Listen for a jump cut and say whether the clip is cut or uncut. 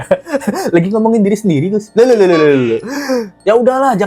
uncut